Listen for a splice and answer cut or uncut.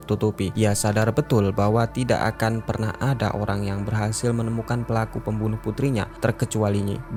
uncut